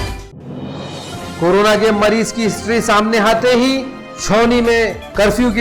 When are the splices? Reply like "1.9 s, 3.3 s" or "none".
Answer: 1.0 s

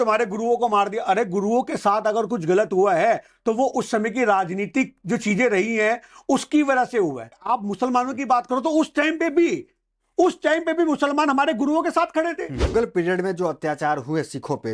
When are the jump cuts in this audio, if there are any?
7.5 s, 12.7 s

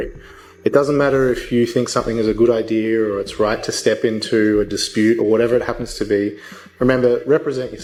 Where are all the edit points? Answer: none

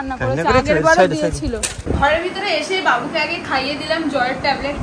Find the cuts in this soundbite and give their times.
1.8 s

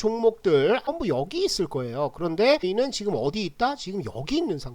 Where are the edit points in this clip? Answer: 0.9 s, 2.7 s

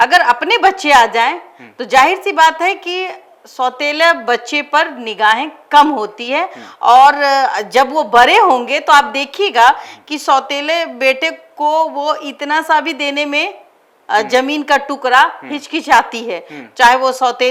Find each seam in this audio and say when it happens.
none

